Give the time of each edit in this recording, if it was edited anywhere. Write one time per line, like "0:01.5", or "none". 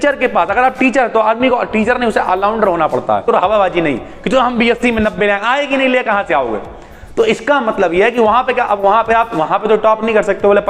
0:03.2